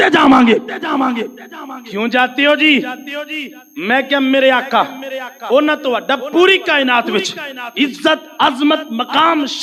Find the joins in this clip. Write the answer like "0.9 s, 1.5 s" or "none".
none